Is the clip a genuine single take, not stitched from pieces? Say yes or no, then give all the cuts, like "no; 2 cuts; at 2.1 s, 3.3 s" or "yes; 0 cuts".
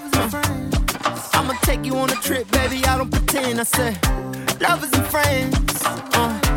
yes; 0 cuts